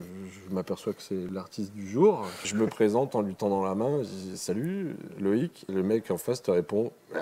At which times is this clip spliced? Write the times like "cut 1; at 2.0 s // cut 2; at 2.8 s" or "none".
cut 1; at 1.3 s // cut 2; at 2.5 s // cut 3; at 5.7 s